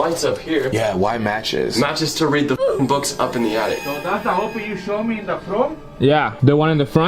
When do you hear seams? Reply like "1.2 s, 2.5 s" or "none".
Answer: 3.8 s